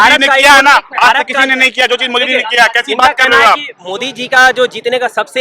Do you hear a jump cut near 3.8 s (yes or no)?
yes